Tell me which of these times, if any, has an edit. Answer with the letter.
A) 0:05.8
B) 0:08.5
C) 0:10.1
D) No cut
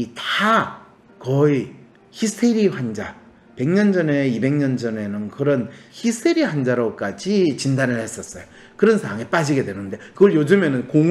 A